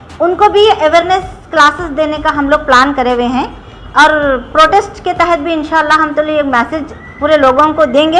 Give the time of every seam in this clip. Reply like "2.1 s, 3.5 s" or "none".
none